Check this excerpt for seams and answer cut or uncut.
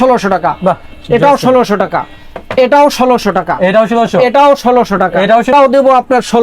cut